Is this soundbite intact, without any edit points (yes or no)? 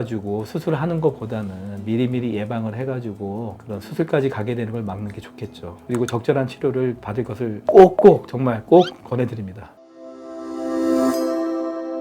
no